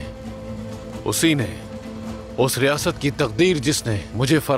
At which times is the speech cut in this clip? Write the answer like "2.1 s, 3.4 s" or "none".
none